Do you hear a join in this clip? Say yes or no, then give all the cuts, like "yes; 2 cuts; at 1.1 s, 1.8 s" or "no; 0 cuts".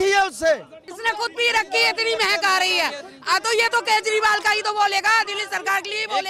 yes; 1 cut; at 0.9 s